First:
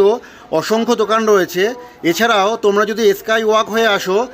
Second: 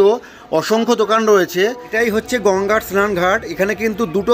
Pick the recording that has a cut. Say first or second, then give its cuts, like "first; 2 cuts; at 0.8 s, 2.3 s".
second; 1 cut; at 1.9 s